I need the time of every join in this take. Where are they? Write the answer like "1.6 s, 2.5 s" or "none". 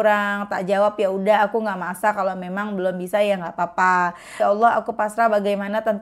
4.3 s